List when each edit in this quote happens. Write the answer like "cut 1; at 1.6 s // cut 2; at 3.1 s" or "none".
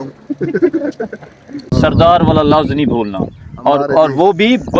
cut 1; at 1.6 s